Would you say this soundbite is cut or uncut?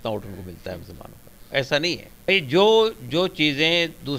cut